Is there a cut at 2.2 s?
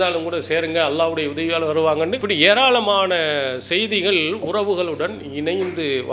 yes; 1 cut; at 2.2 s

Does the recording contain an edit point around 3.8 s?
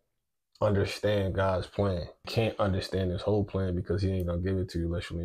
no; 1 cut; at 2.3 s

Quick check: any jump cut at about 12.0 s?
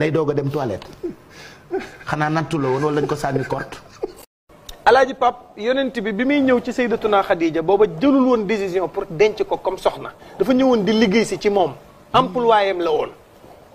no; 1 cut; at 4.4 s

